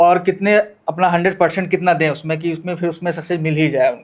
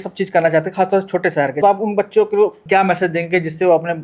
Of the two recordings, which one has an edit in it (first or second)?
second